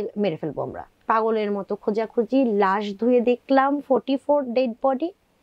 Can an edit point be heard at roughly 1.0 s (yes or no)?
yes